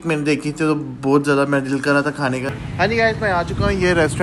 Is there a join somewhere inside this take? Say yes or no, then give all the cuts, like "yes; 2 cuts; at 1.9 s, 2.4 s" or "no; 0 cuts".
yes; 1 cut; at 2.5 s